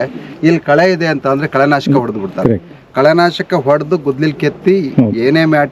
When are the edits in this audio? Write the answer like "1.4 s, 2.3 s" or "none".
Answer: none